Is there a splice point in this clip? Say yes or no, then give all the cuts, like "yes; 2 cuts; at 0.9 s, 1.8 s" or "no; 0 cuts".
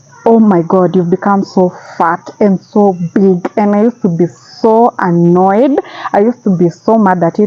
no; 0 cuts